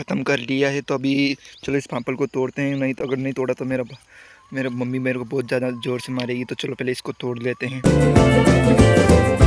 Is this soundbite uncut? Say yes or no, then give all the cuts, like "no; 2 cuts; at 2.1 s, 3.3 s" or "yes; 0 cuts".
yes; 0 cuts